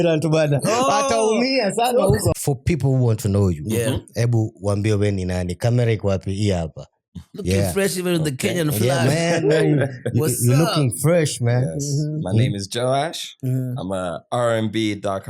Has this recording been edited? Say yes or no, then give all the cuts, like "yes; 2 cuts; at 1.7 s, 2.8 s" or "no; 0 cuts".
yes; 1 cut; at 2.3 s